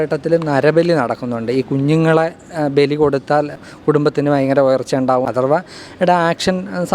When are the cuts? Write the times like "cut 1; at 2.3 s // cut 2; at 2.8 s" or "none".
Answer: cut 1; at 3.2 s // cut 2; at 5.2 s